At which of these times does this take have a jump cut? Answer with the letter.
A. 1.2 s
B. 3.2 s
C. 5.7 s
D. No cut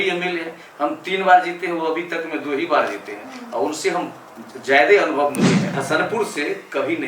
C